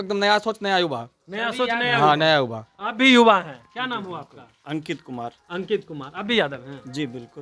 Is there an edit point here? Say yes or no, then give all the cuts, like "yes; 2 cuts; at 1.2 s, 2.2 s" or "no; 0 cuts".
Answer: no; 0 cuts